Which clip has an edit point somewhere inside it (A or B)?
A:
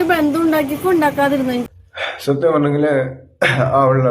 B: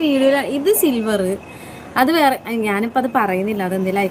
A